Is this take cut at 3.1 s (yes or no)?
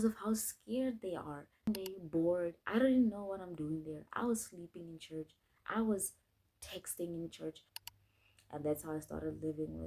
no